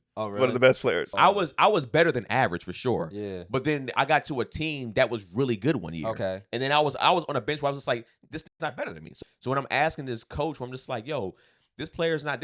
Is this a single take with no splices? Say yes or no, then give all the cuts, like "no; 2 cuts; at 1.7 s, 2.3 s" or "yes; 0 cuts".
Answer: no; 2 cuts; at 1.1 s, 9.1 s